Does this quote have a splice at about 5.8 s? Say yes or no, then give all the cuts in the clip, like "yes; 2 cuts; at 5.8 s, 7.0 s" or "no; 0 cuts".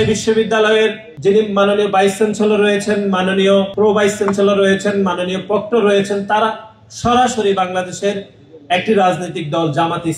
no; 2 cuts; at 1.1 s, 3.7 s